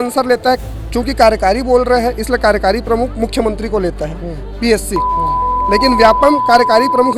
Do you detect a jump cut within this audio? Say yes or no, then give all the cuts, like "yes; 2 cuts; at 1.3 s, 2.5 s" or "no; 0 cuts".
no; 0 cuts